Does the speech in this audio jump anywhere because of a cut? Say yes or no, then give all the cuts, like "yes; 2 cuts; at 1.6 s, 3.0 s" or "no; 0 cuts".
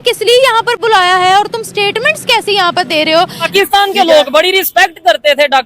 yes; 1 cut; at 3.4 s